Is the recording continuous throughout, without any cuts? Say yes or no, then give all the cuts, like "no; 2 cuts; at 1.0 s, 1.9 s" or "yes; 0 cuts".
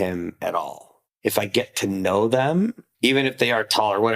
no; 2 cuts; at 0.9 s, 2.8 s